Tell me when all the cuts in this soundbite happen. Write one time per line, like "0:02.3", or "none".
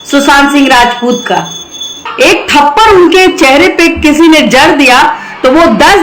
0:02.1